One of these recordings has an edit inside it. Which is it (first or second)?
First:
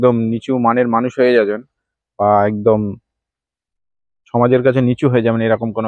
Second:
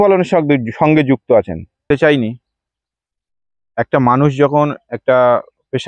second